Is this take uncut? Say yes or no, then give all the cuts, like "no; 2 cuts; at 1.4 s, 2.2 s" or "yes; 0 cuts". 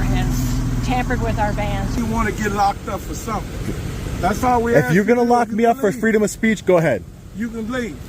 no; 1 cut; at 2.0 s